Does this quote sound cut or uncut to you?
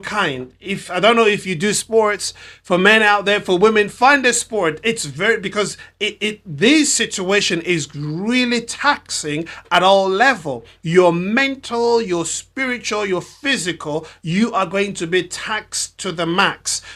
uncut